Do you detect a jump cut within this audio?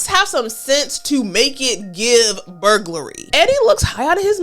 yes; 1 cut; at 3.2 s

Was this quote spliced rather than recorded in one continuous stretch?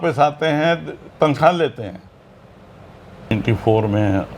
yes; 1 cut; at 3.3 s

